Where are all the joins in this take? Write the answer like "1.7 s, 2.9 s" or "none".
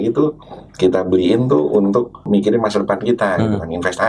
2.2 s